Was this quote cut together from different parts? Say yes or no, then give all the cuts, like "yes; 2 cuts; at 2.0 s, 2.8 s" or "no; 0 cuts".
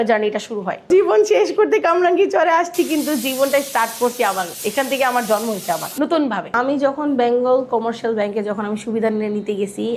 no; 0 cuts